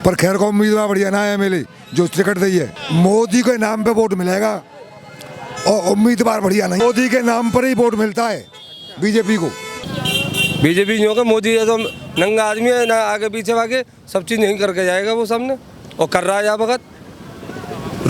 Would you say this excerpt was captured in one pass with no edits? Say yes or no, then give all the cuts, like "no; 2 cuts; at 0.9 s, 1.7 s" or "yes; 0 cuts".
no; 3 cuts; at 2.8 s, 6.8 s, 9.9 s